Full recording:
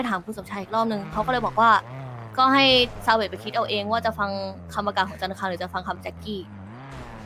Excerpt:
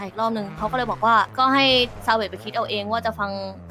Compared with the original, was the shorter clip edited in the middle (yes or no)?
yes